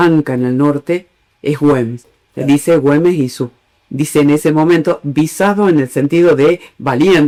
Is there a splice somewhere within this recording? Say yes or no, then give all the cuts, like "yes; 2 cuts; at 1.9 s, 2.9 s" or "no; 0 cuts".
no; 0 cuts